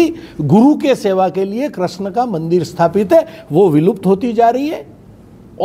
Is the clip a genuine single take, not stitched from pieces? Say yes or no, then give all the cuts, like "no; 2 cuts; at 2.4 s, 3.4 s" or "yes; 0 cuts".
yes; 0 cuts